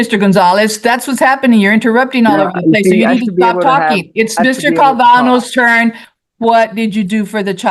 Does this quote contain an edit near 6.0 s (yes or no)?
yes